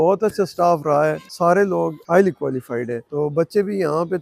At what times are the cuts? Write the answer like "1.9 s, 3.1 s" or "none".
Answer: 1.3 s, 2.0 s, 3.0 s